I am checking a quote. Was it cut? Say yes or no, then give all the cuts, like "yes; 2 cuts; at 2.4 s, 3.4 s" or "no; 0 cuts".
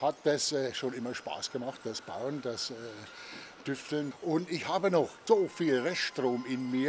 yes; 2 cuts; at 4.1 s, 5.2 s